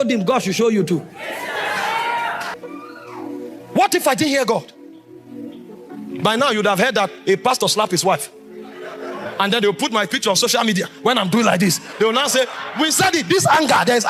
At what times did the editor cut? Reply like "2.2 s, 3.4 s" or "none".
2.5 s